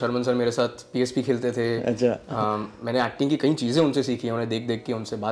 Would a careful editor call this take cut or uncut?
uncut